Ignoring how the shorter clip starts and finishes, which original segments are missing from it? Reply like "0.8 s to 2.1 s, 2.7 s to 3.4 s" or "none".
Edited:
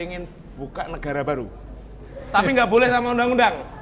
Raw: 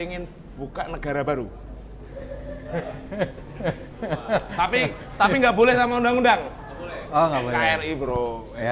2.2 s to 5.0 s